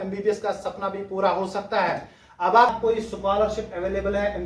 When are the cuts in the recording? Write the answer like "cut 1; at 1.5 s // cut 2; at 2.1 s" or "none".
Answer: cut 1; at 2.7 s